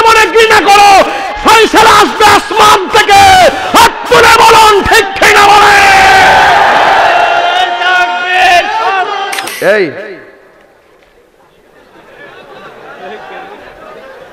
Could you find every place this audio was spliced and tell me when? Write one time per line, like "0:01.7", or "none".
0:09.5